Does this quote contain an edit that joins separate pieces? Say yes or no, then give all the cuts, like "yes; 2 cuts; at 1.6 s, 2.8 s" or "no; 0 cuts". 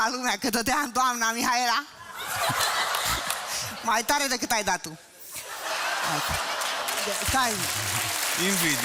no; 0 cuts